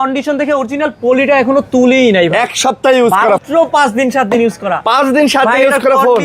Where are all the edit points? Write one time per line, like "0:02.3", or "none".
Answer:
0:03.4

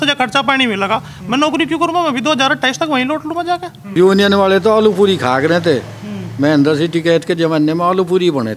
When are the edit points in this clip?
0:03.8

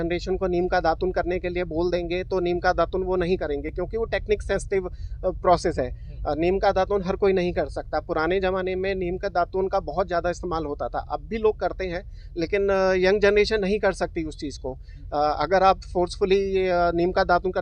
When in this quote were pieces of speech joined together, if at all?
none

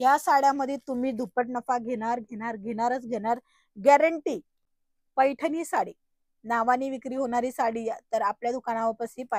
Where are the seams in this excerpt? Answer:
0:04.5

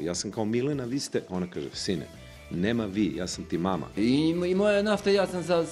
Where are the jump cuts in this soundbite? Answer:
0:03.9

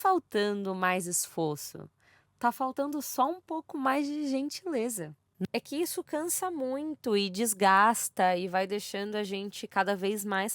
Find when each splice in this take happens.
0:05.3

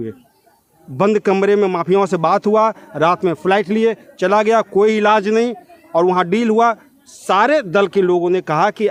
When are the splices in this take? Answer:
none

